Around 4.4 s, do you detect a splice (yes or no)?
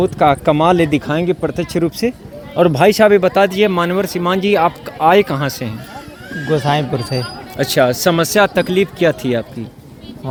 no